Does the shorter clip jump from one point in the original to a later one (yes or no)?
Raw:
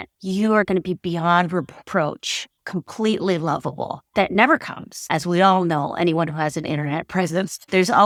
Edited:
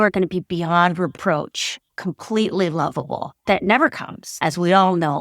yes